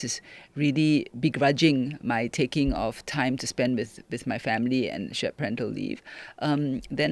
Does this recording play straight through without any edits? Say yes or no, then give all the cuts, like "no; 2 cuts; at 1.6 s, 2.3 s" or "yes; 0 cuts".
yes; 0 cuts